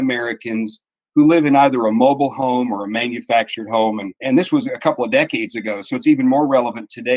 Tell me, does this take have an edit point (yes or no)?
yes